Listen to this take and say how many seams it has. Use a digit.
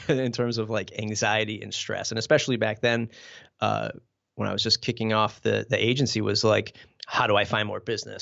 0